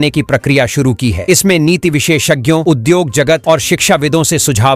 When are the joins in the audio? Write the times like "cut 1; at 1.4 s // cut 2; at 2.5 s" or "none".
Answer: none